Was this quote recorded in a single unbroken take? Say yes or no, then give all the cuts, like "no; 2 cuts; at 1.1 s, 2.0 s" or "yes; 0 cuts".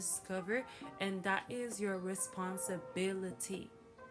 yes; 0 cuts